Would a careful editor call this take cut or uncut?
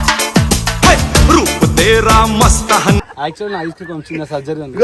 cut